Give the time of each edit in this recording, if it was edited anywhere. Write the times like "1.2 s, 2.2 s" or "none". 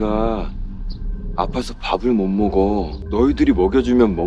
3.0 s